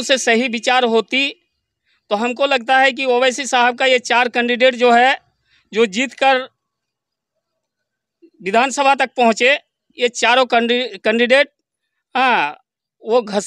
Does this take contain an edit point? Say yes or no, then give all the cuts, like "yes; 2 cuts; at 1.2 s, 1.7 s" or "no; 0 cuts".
no; 0 cuts